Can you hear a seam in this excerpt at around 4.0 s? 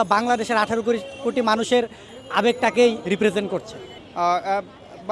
yes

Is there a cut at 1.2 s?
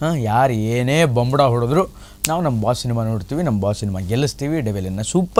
no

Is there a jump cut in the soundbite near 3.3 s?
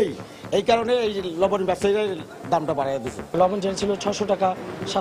yes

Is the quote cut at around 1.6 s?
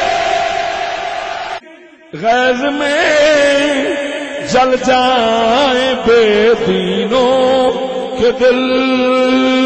yes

